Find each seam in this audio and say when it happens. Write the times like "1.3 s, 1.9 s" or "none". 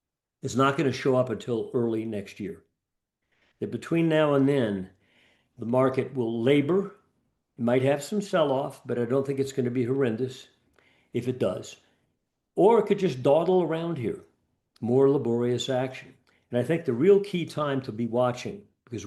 none